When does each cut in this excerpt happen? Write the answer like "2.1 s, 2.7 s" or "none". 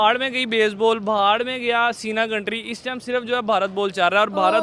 none